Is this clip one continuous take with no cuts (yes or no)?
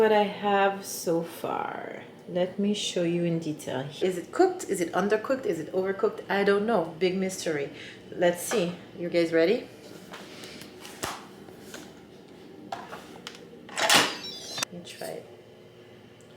no